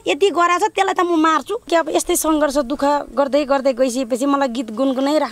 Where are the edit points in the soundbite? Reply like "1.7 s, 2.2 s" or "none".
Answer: 1.7 s